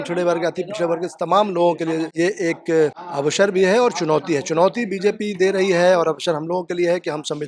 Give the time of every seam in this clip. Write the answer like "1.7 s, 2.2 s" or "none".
2.1 s, 3.1 s